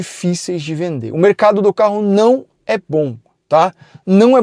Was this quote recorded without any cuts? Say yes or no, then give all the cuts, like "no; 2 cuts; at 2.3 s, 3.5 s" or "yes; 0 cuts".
yes; 0 cuts